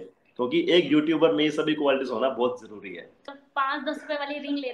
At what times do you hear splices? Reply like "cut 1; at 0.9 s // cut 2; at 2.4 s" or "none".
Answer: cut 1; at 3.4 s